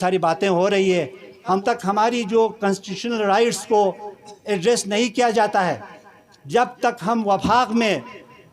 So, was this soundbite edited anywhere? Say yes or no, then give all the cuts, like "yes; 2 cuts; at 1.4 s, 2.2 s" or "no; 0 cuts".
yes; 1 cut; at 1.6 s